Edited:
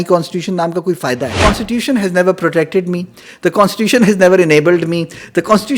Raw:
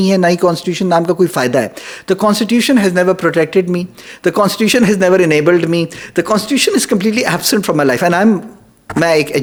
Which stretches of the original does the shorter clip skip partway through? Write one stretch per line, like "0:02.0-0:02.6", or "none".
0:01.7-0:02.2